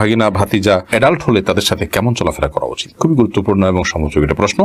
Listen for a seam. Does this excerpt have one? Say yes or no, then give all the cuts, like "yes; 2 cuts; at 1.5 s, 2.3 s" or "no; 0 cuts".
no; 0 cuts